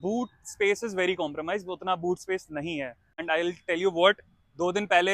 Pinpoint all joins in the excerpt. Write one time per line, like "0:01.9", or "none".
0:03.2